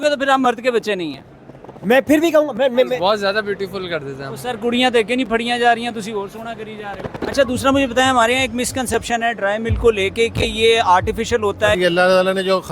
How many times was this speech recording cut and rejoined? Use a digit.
3